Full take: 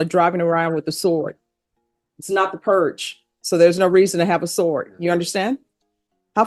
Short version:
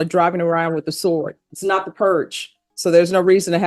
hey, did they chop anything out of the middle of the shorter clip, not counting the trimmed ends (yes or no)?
yes